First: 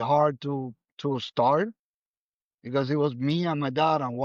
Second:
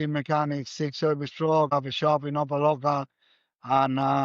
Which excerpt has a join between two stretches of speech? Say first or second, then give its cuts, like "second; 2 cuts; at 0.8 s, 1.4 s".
second; 1 cut; at 1.7 s